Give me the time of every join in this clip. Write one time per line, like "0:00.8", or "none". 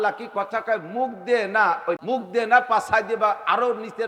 0:02.0